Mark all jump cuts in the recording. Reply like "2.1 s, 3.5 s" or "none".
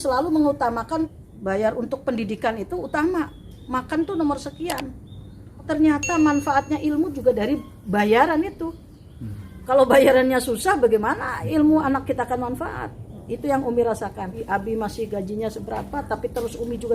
1.2 s, 5.6 s, 14.4 s